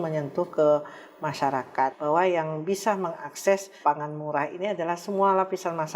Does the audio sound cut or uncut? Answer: cut